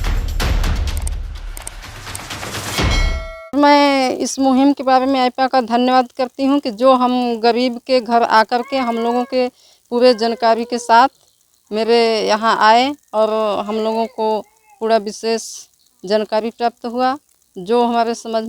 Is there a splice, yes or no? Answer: yes